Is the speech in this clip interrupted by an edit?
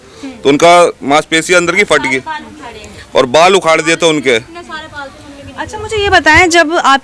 no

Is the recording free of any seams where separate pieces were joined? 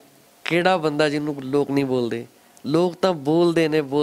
yes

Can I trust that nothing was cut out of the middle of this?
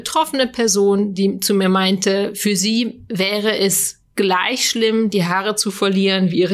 yes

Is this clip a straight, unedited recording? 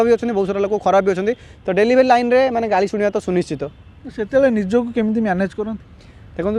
yes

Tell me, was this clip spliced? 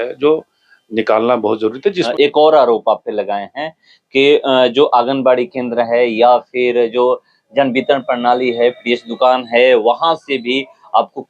yes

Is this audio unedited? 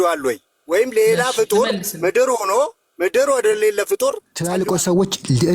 no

